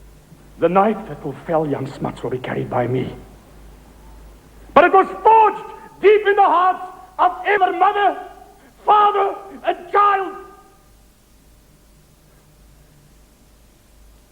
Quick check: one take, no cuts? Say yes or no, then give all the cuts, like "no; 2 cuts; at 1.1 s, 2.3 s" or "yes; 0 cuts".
no; 1 cut; at 7.6 s